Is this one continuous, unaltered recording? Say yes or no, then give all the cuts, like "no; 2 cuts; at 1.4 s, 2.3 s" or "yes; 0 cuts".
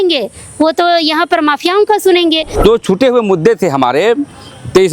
no; 1 cut; at 2.5 s